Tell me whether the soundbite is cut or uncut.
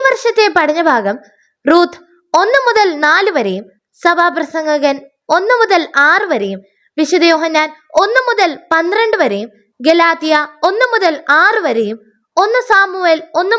uncut